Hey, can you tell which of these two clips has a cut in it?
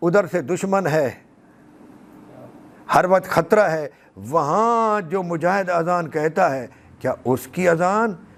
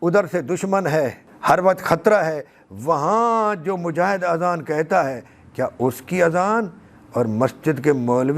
second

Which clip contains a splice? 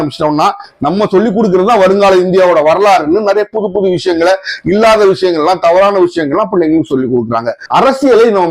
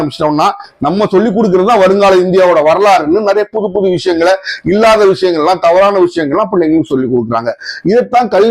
first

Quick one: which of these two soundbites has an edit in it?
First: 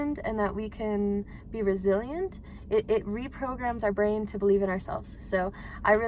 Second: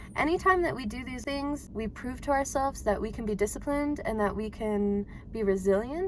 second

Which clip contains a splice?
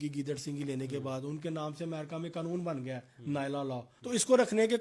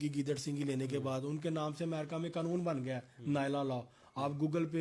first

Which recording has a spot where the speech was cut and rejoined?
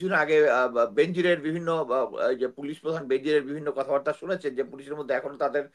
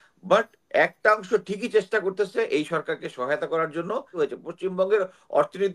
second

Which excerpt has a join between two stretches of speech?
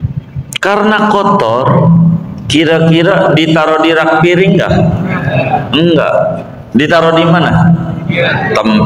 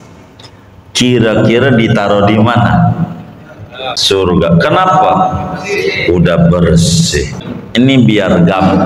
second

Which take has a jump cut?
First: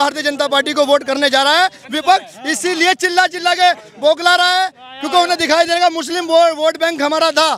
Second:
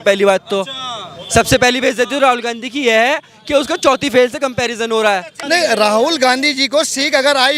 second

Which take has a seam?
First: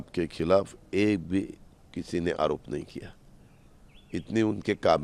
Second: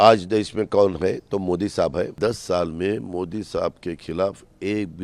second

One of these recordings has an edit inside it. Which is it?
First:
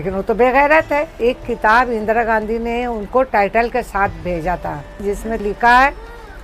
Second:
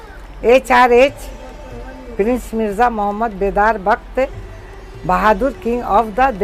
first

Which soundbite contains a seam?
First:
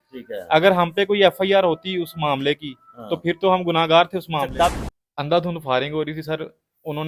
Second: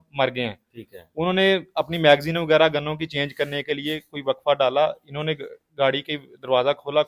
first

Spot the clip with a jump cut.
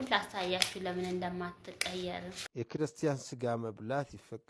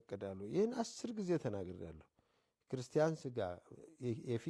first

